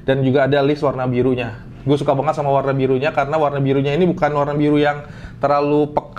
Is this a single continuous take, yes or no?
yes